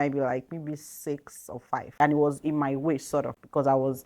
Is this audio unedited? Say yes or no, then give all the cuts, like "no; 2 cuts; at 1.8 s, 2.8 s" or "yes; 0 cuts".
no; 1 cut; at 2.0 s